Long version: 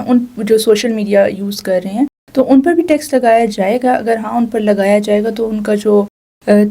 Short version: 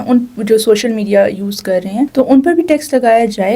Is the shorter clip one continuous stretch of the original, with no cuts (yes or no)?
no